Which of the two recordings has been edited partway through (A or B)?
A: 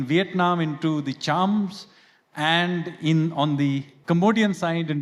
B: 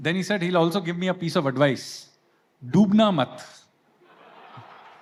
A